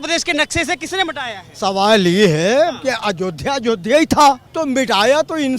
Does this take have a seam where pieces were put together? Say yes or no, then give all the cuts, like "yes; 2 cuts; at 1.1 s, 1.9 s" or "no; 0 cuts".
yes; 1 cut; at 4.5 s